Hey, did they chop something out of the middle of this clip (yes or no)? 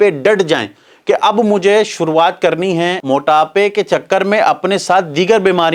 yes